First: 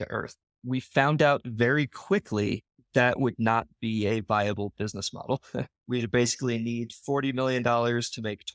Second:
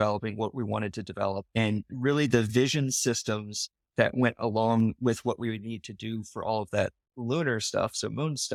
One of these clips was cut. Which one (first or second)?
first